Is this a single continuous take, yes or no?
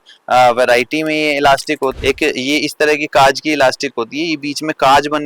no